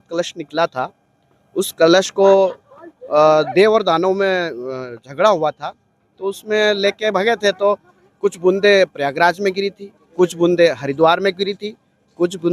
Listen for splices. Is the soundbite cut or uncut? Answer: uncut